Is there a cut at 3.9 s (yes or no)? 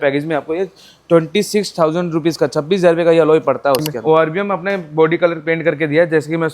yes